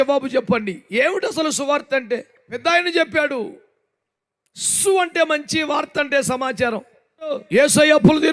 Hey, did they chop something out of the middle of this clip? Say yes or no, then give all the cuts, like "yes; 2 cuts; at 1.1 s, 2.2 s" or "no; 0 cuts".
yes; 2 cuts; at 2.6 s, 7.4 s